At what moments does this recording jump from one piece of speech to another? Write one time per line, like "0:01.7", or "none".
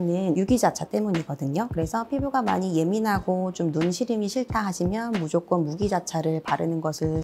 none